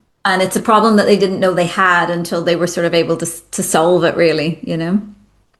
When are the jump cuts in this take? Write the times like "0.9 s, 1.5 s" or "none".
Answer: none